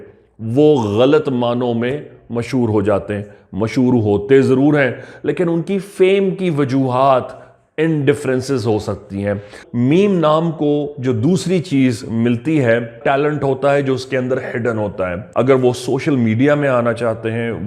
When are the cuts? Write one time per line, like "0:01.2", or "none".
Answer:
0:09.6
0:13.0
0:15.2